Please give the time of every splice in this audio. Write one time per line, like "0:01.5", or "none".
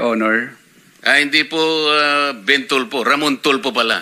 none